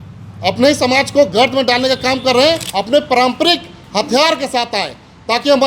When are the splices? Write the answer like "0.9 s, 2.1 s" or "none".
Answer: 2.7 s